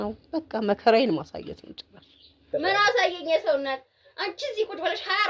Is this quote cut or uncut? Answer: cut